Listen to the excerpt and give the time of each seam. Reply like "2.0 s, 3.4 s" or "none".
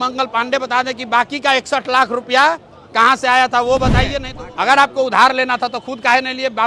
4.2 s